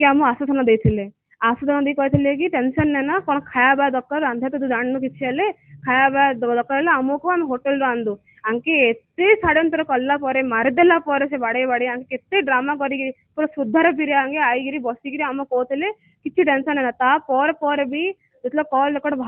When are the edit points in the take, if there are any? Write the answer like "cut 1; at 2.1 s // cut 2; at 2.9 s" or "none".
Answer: none